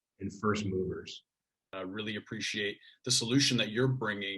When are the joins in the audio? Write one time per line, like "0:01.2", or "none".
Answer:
0:01.6